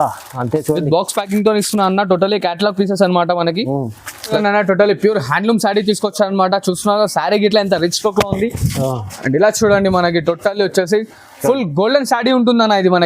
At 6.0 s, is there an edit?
no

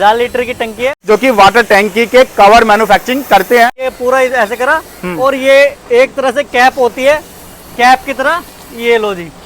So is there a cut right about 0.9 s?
yes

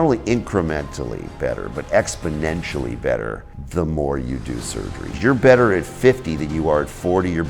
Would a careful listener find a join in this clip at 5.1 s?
yes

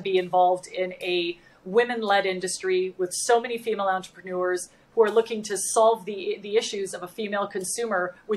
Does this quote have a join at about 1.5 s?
no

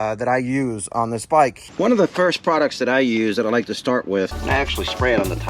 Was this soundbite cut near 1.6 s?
yes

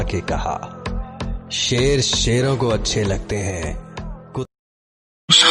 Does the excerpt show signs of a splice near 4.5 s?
yes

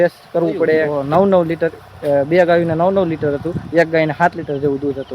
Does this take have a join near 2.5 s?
no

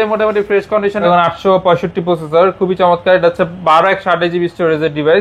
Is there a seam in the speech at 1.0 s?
yes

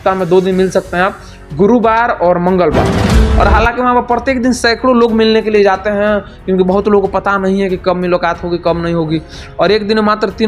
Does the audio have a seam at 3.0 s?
yes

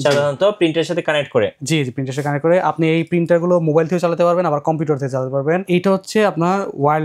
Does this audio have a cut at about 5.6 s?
yes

